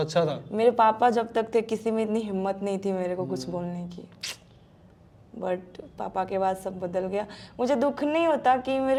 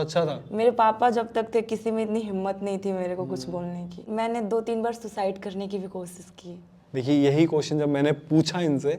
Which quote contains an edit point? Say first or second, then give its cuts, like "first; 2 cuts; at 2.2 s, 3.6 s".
second; 1 cut; at 4.0 s